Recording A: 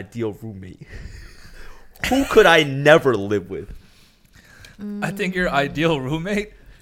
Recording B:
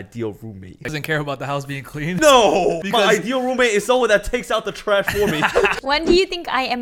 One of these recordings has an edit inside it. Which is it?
B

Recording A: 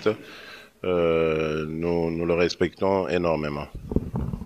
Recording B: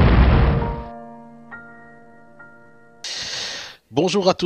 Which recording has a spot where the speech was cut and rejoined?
B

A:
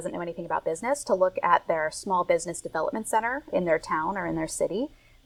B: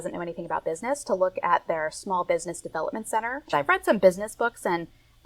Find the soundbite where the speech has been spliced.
B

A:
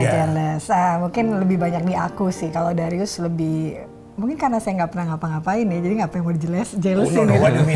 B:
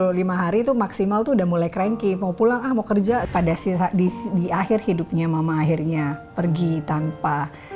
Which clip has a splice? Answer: B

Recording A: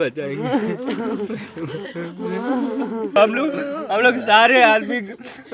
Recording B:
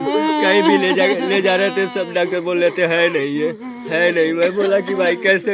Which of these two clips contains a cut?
A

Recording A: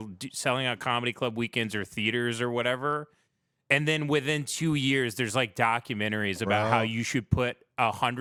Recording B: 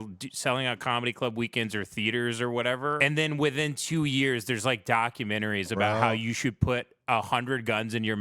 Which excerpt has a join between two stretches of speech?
B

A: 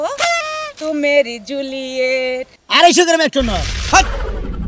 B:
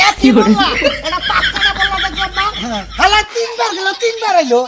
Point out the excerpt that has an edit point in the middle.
A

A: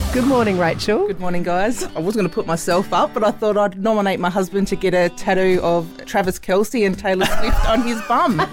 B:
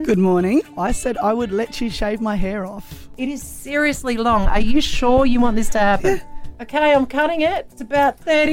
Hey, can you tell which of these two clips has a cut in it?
A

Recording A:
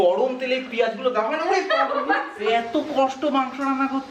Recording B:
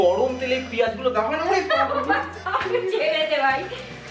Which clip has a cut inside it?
A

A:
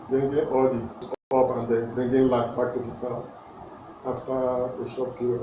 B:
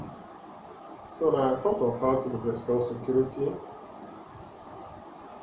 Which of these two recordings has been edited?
A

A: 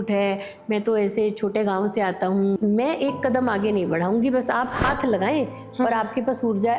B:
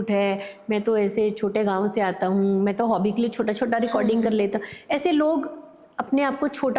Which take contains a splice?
A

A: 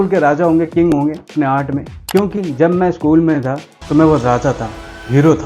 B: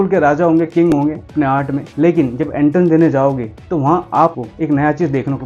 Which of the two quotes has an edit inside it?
A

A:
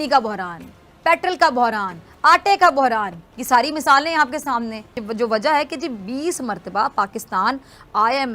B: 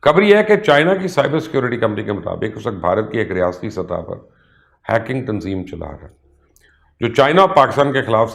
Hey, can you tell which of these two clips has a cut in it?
A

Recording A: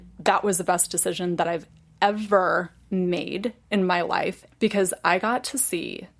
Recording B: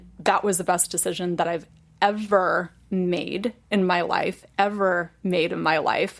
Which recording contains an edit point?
A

